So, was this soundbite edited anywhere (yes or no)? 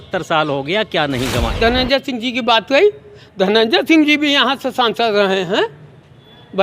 yes